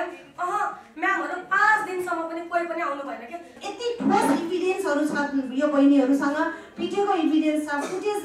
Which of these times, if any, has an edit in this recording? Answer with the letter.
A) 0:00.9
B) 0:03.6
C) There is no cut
B